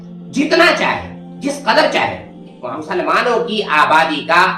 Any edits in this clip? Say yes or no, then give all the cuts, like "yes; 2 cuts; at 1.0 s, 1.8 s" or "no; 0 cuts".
yes; 1 cut; at 2.7 s